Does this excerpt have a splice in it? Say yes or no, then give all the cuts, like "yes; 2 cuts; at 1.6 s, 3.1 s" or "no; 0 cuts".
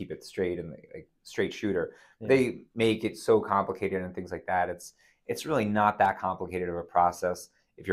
no; 0 cuts